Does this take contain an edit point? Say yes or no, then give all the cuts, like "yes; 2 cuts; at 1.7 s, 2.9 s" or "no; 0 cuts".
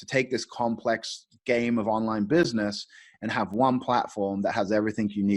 no; 0 cuts